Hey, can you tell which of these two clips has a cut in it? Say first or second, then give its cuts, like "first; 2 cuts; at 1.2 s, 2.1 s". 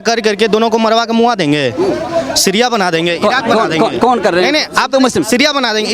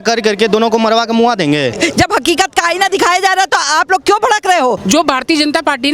second; 2 cuts; at 1.7 s, 4.8 s